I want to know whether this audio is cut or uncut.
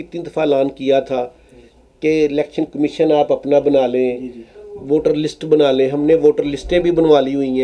uncut